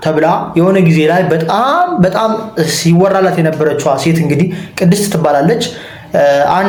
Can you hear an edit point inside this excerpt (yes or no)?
no